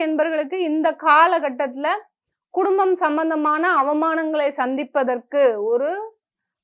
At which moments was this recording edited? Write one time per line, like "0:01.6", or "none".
none